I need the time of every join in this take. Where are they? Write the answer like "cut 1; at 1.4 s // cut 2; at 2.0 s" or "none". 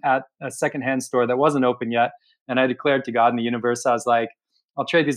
none